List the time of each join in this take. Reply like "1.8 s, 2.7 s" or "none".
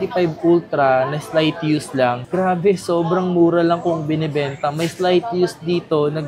none